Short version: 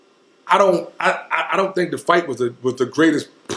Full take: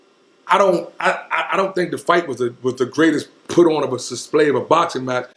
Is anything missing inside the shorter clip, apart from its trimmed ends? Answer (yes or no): no